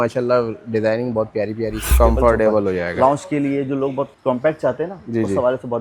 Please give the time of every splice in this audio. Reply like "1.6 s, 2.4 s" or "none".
1.9 s, 4.1 s